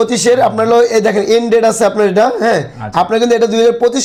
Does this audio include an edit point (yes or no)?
no